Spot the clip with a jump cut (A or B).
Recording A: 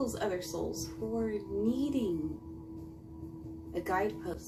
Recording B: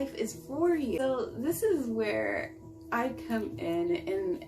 B